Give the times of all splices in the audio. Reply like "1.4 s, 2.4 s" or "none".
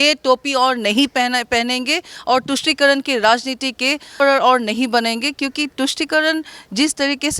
4.1 s